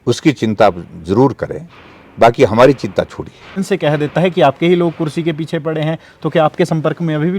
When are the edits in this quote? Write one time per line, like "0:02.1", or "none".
0:03.6